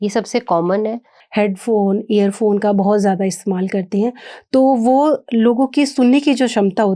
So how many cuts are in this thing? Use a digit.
1